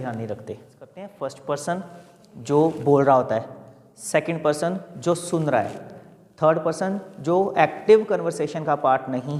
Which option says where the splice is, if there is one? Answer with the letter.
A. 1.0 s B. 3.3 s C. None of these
A